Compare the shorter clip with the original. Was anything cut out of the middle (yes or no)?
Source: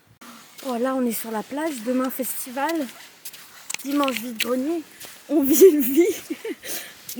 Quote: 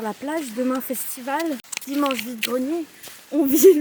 yes